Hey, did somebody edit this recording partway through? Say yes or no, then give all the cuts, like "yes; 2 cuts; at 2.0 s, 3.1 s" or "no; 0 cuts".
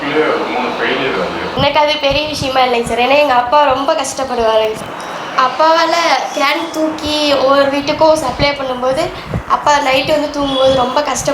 yes; 1 cut; at 5.2 s